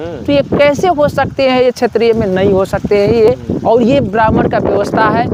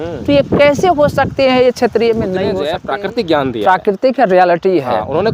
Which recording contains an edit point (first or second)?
second